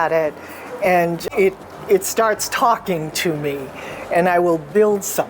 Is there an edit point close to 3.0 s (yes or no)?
no